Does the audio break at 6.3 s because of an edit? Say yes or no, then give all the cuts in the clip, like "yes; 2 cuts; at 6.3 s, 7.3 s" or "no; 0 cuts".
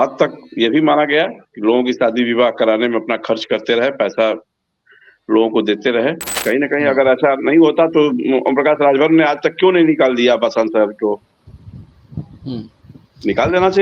yes; 1 cut; at 6.3 s